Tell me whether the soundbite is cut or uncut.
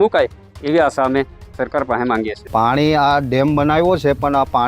cut